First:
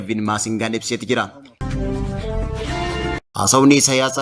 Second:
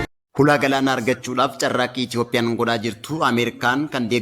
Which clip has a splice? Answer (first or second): first